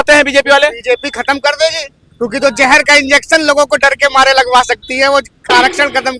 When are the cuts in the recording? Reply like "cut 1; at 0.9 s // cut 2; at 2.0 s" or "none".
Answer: none